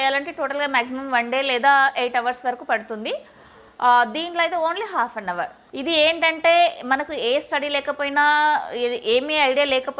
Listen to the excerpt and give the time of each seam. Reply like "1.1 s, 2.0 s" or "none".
5.6 s